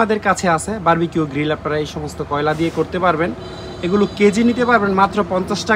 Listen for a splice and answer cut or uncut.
uncut